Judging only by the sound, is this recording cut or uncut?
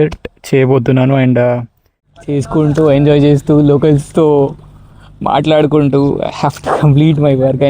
cut